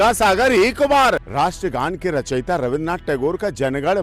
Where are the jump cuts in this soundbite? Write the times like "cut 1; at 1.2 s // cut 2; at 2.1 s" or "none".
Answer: cut 1; at 1.3 s